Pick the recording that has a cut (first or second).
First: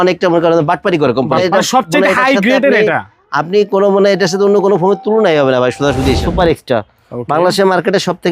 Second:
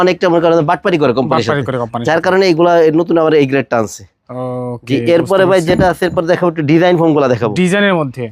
first